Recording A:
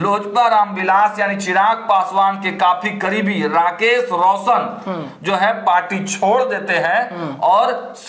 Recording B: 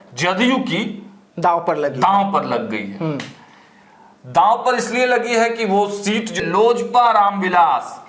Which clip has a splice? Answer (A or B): B